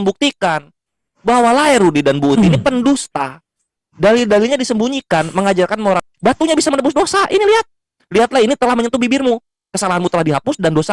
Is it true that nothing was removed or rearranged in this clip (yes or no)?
no